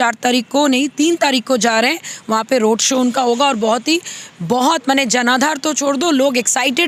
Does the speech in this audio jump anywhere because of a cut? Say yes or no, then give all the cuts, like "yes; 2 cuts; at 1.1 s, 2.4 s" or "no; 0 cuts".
no; 0 cuts